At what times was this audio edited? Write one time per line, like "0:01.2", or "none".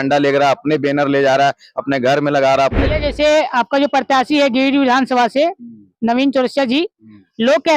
0:02.8